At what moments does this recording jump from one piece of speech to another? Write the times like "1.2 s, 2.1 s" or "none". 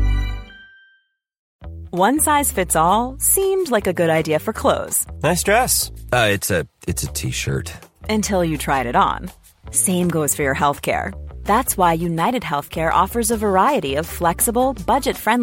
1.5 s